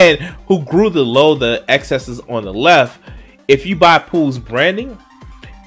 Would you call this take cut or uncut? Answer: uncut